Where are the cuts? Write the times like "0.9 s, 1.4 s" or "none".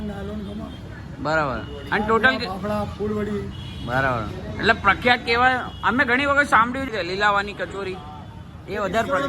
6.9 s